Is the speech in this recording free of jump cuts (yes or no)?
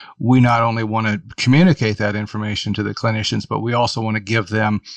yes